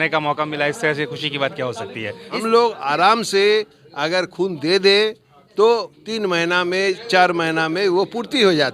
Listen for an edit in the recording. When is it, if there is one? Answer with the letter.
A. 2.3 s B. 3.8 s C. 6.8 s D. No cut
A